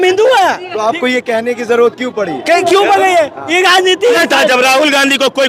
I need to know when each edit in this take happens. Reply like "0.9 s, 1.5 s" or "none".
4.2 s